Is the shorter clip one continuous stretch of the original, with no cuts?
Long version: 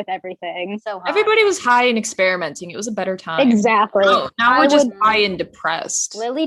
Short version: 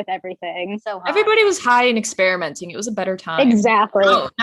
yes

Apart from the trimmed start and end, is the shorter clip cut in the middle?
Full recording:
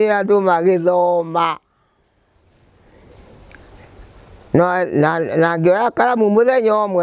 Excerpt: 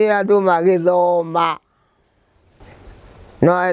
yes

